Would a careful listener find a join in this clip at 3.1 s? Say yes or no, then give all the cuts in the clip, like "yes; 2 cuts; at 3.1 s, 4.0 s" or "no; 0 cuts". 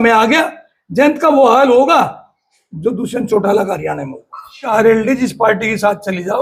no; 1 cut; at 4.7 s